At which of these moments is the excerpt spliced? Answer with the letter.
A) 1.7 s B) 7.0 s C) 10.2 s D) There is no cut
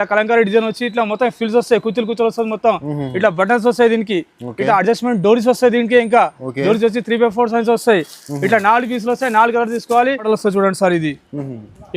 C